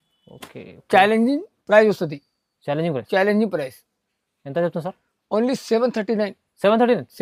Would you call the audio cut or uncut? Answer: uncut